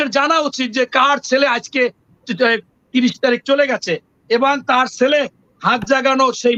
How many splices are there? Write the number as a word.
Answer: zero